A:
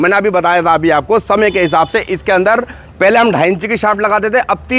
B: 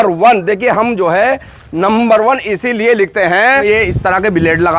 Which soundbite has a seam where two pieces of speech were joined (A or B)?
B